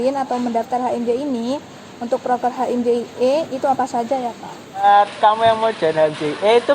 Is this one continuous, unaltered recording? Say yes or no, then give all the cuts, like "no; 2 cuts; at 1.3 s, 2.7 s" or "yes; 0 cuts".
no; 1 cut; at 4.8 s